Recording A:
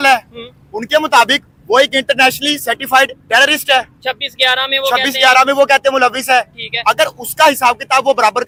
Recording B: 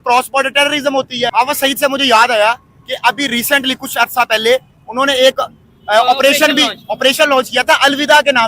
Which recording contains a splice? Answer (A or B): B